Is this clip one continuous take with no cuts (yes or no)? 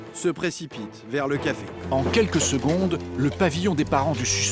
no